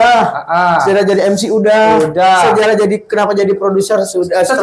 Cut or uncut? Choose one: uncut